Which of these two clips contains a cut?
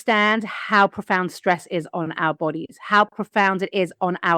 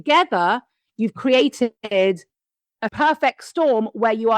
second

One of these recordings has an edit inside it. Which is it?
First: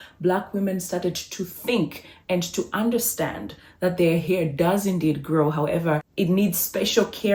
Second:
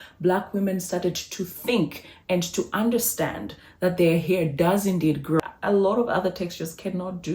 second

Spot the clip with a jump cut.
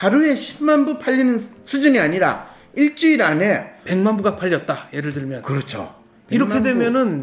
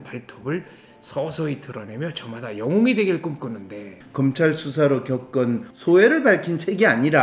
second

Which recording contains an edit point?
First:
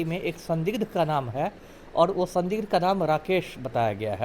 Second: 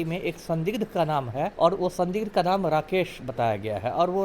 second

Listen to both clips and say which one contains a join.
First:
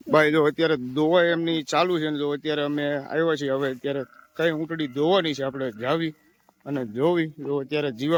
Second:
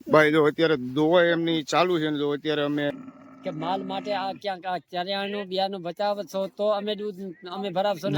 second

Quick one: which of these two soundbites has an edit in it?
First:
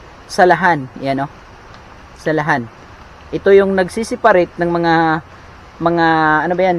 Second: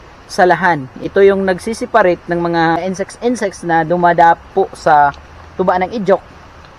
second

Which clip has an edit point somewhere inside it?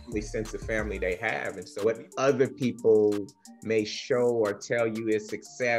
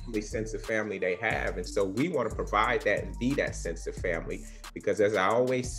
first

